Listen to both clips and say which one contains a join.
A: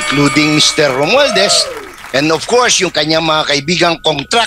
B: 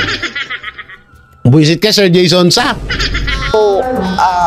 B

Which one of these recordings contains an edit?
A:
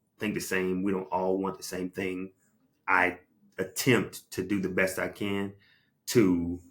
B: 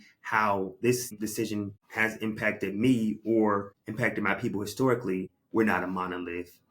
B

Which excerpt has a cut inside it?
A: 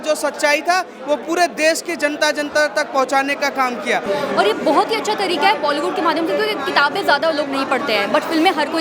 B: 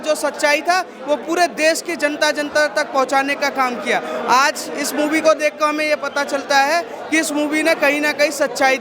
A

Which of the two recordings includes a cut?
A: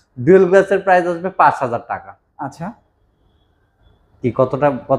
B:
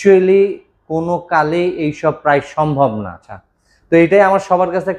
B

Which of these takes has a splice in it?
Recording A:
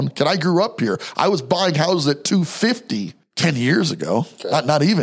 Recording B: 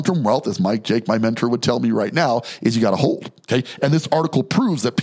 A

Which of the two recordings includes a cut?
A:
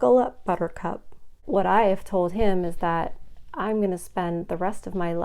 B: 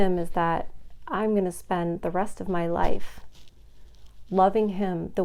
A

